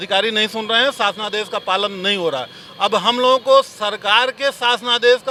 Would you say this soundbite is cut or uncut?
uncut